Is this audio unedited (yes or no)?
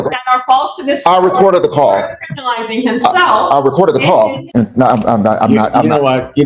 no